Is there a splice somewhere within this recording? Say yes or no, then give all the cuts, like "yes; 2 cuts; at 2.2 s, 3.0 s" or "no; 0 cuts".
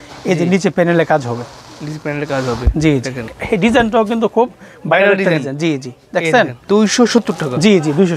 yes; 2 cuts; at 3.3 s, 6.6 s